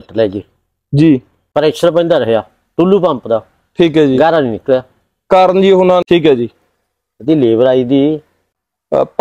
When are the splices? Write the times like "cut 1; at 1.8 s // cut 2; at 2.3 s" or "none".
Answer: cut 1; at 6.0 s